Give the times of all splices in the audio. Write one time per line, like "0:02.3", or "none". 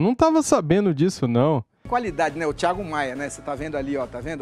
0:01.8